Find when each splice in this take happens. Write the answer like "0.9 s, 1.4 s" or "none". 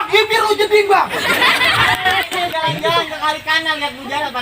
2.5 s